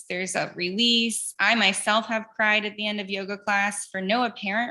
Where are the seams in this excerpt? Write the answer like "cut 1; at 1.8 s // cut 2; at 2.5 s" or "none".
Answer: none